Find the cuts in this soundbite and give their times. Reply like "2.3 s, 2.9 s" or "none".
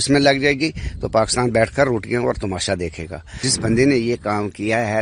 3.4 s